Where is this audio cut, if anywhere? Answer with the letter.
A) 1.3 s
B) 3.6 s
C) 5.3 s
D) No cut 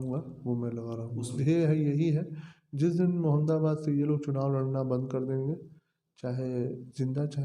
A